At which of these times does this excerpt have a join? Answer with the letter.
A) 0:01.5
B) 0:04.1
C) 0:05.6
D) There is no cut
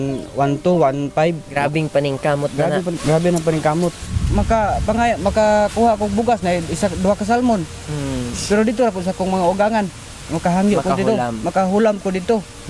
B